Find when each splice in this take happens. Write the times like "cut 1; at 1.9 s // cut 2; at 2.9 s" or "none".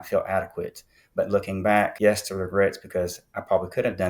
cut 1; at 1.9 s